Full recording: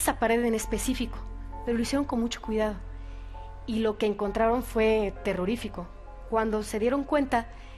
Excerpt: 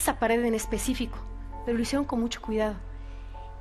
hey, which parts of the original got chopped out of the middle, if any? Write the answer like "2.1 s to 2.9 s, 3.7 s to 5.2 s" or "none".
none